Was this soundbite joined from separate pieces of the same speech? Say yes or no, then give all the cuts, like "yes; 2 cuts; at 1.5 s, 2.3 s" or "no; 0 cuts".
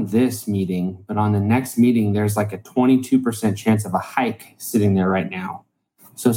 no; 0 cuts